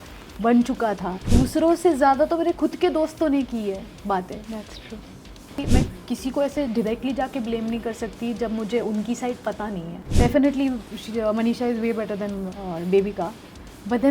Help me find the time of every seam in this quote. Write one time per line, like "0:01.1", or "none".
0:01.1
0:05.6
0:10.0

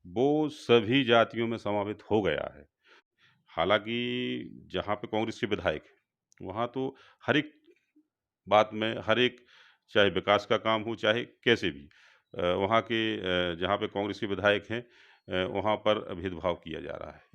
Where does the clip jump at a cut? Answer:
0:02.9

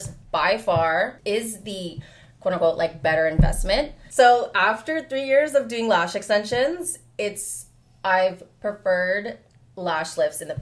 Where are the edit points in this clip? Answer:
0:01.2
0:04.0

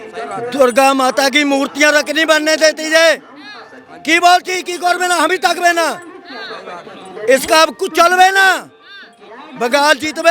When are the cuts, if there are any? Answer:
none

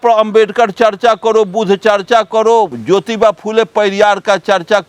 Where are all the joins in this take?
none

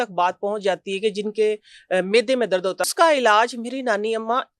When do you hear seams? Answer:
0:02.8

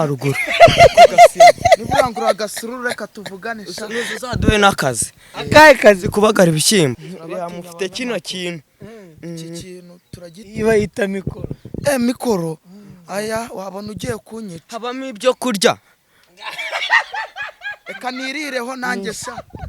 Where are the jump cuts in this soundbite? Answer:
0:07.1

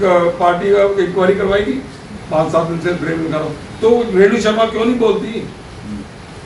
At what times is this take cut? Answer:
0:02.1

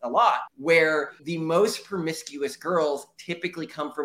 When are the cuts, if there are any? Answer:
0:01.2

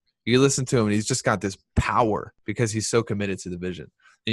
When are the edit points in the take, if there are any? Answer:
0:02.4

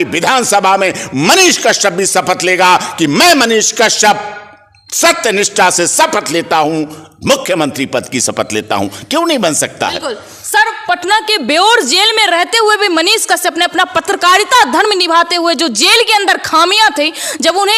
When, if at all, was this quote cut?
none

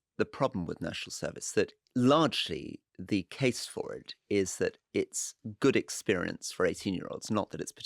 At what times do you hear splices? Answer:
0:01.8

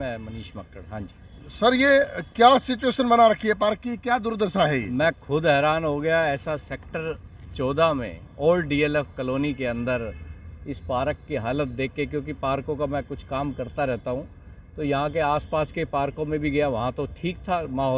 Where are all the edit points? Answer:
none

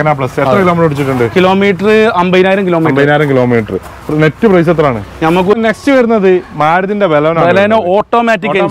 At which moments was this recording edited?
0:05.5

